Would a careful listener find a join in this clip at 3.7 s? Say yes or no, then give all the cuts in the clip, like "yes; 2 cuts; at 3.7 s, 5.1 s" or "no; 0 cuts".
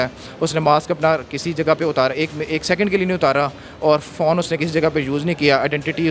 no; 0 cuts